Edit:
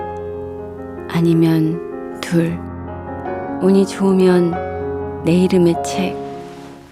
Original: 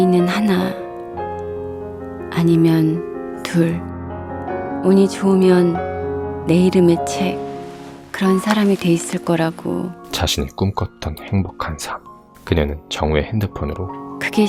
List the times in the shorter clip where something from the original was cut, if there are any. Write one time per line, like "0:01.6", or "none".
none